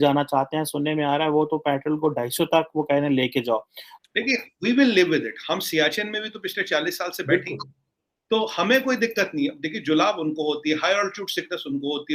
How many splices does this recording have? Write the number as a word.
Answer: one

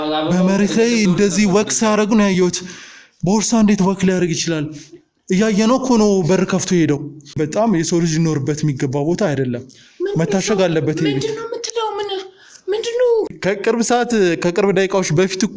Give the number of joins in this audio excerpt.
two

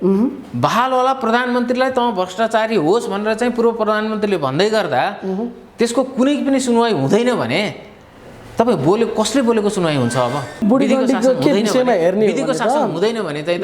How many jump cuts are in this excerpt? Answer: one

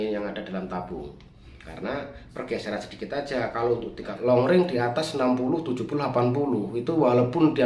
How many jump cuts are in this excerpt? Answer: one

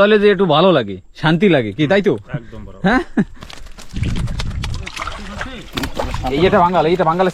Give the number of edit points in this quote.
one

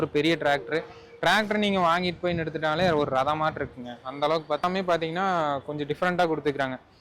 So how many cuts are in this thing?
one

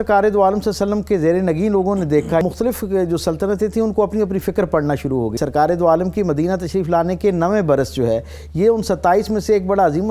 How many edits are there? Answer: two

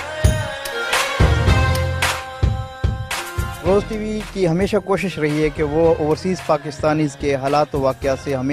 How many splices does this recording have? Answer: zero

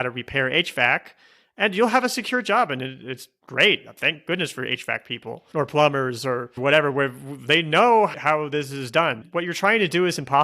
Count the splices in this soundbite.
one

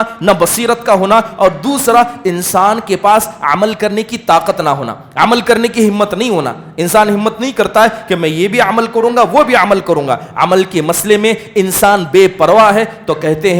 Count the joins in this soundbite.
zero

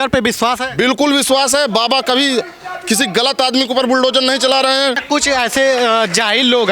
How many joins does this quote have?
one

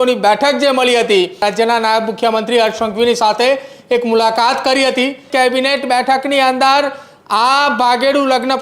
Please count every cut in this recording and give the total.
two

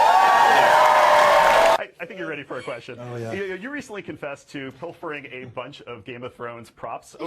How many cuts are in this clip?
one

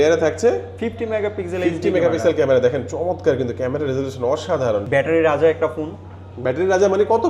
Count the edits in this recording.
one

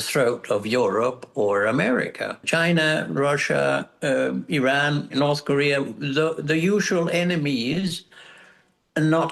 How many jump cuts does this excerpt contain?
two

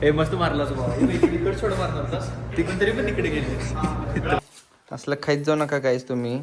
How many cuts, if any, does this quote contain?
one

